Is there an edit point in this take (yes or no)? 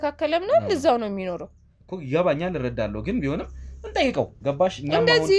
no